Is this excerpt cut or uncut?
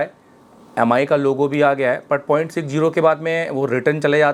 uncut